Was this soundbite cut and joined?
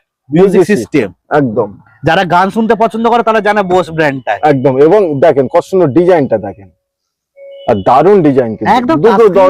no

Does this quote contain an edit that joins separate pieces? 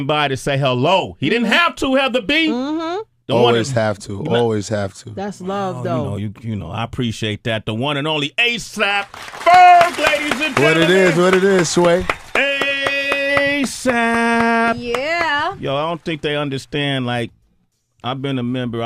yes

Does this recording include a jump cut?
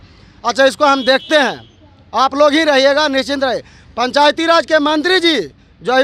no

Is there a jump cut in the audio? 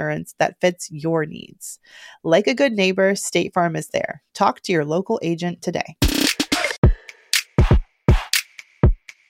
yes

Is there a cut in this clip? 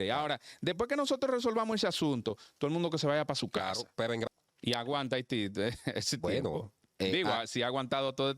yes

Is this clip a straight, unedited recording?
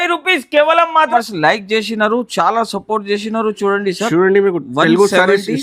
no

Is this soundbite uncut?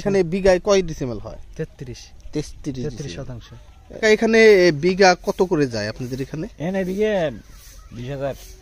no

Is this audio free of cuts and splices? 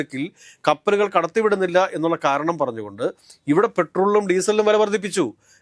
yes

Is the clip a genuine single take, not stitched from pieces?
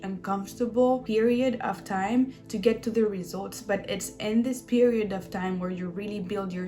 no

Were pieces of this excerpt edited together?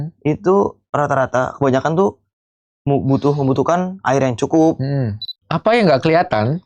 yes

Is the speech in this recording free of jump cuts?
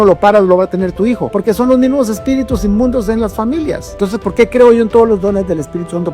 no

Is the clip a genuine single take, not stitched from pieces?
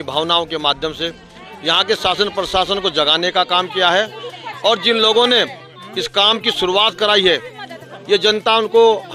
yes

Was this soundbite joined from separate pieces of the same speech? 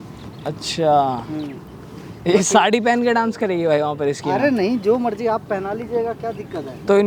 no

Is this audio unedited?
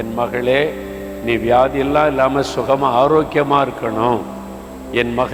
yes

